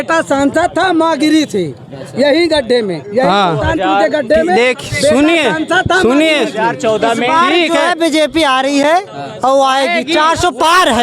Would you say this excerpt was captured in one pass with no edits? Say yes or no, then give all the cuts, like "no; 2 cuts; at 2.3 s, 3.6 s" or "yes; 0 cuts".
yes; 0 cuts